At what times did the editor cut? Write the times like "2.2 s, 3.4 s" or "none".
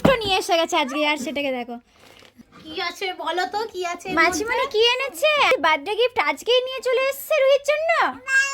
2.3 s, 5.5 s